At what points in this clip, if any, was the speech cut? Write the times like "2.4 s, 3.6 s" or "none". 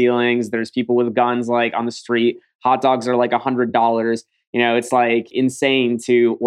5.3 s